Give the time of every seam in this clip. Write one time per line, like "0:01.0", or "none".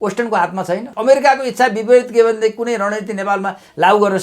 0:00.9